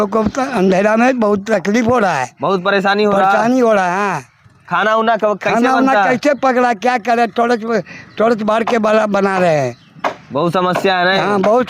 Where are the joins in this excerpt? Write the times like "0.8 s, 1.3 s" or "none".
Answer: none

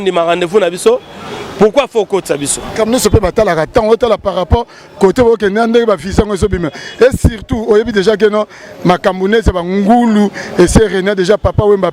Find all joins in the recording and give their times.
2.7 s

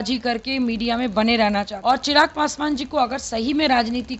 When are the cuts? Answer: 1.7 s

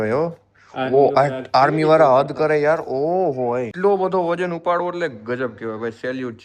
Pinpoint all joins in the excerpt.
3.7 s

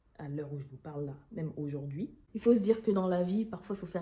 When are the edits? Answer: 2.2 s

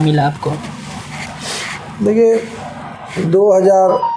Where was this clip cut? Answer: none

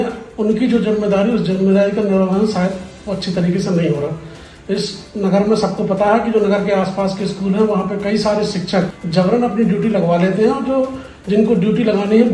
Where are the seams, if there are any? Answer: 9.0 s

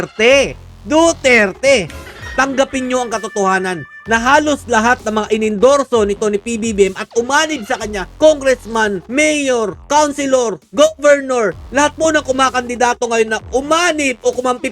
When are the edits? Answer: 2.2 s

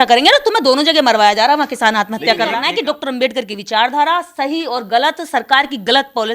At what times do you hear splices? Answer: 2.6 s

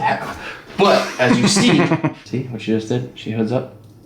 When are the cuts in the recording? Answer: 2.2 s

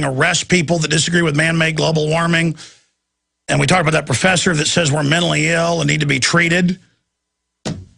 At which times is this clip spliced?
1.7 s

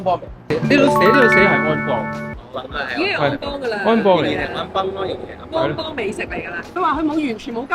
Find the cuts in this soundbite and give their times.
6.8 s

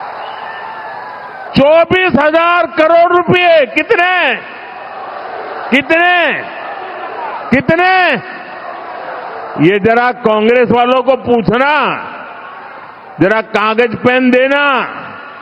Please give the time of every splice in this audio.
1.5 s

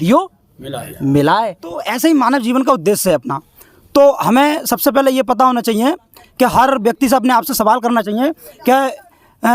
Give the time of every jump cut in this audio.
1.9 s

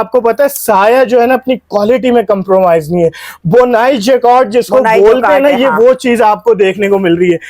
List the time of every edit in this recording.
none

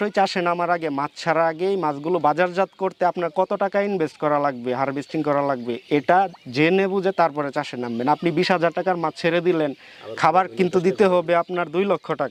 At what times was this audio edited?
none

